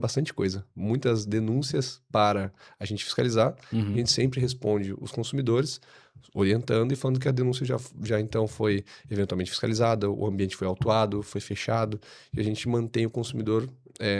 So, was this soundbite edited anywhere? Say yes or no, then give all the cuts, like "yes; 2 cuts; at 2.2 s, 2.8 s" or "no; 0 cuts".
no; 0 cuts